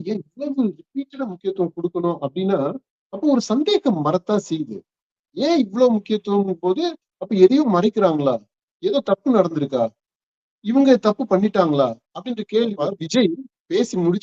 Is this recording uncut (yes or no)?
no